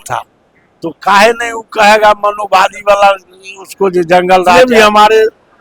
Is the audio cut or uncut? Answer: cut